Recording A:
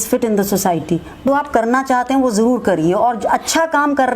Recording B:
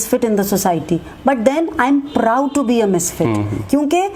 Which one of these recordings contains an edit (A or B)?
A